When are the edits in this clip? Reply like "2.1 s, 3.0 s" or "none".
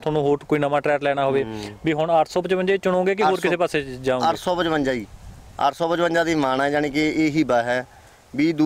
none